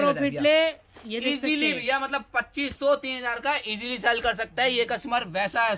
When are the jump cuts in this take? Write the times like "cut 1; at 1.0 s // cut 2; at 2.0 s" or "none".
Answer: none